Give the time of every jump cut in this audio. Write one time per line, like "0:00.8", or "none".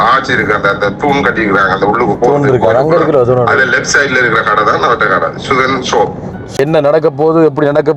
0:06.5